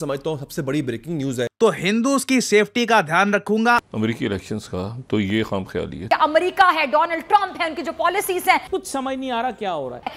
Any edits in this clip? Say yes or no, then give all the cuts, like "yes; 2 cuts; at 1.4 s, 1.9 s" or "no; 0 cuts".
yes; 4 cuts; at 1.5 s, 3.8 s, 6.0 s, 8.7 s